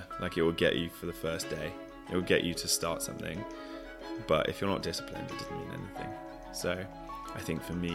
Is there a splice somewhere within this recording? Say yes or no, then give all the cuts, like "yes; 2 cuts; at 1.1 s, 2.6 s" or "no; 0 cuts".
no; 0 cuts